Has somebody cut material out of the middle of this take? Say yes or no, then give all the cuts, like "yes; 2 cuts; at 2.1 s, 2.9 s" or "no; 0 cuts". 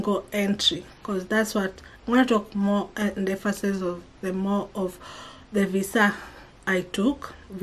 no; 0 cuts